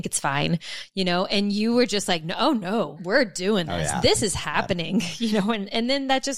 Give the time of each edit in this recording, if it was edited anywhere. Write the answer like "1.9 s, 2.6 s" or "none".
3.0 s